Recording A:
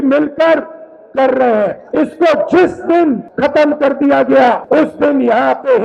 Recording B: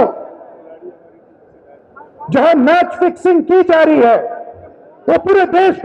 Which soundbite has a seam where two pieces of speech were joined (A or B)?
A